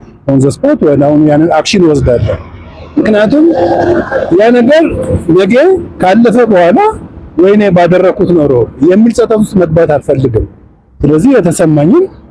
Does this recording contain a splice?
no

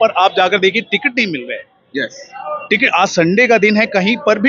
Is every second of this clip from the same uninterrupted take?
yes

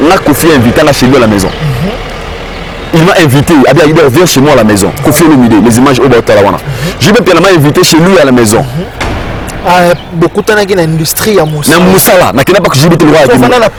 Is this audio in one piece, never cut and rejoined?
yes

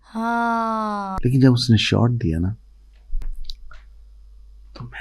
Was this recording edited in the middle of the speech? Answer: yes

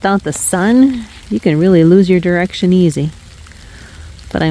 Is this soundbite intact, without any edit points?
yes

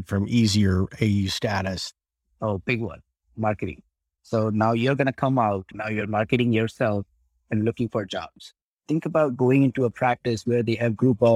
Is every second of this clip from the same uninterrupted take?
no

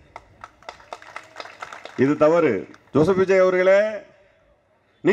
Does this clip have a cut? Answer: yes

